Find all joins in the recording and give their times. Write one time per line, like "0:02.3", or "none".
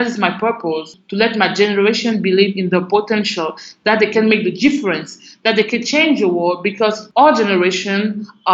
0:01.0
0:04.1
0:07.0